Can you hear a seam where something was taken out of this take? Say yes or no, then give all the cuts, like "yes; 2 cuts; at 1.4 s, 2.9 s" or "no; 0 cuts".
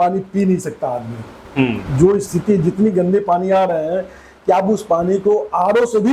no; 0 cuts